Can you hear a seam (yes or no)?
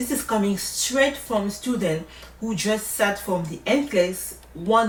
no